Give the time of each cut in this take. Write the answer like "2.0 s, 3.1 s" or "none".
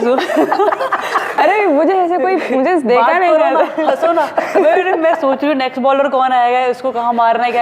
1.3 s